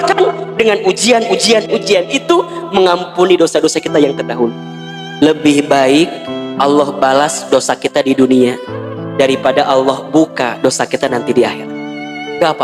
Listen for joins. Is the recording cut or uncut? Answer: cut